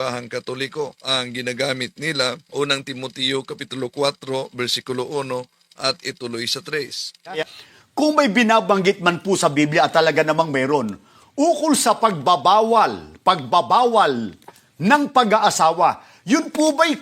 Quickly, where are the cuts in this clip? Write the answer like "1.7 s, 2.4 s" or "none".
1.0 s, 2.4 s, 7.4 s

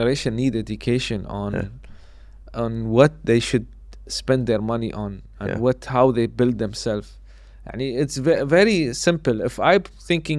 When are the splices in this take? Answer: none

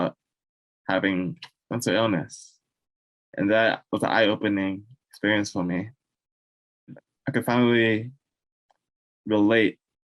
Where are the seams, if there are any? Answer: 6.9 s

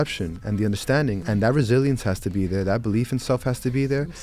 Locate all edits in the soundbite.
1.2 s

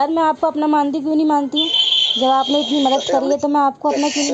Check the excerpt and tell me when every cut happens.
none

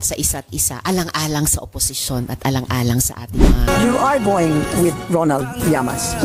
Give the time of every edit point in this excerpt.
3.5 s

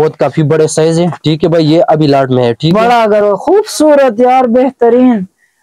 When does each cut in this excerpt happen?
2.7 s

